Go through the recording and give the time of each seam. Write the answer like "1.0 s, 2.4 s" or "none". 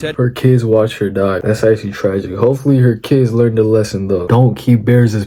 1.4 s, 4.2 s